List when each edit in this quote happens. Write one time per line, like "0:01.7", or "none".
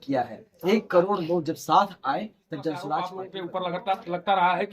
0:03.2